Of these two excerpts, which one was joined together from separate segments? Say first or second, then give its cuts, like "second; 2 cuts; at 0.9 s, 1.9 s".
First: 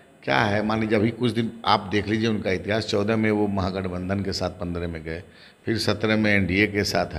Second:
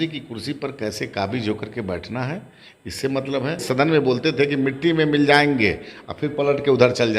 second; 1 cut; at 3.6 s